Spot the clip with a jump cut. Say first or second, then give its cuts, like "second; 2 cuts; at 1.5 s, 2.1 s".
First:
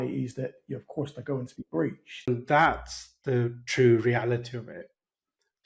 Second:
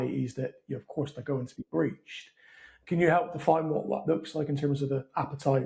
first; 1 cut; at 2.3 s